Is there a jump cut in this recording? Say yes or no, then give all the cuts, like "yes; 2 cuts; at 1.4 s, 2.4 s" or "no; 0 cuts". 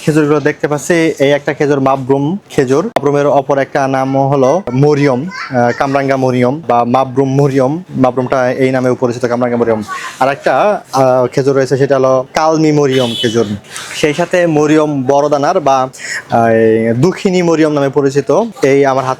yes; 3 cuts; at 3.0 s, 4.7 s, 6.6 s